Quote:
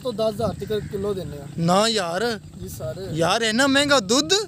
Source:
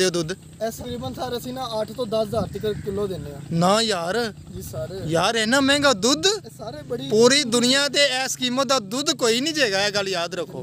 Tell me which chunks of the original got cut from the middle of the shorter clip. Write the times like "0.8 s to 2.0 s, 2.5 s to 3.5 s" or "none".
none